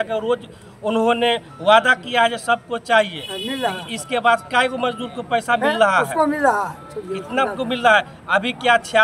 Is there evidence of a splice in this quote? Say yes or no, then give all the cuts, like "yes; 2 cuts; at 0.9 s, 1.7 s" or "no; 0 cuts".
no; 0 cuts